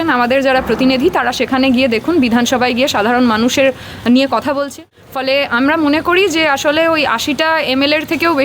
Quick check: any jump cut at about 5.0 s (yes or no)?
yes